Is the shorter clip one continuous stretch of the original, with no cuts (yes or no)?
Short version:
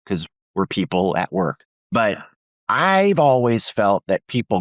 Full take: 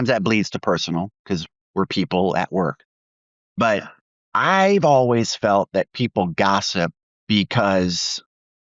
no